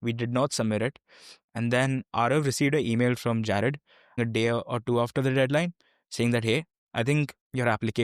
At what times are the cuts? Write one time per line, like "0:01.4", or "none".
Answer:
0:04.2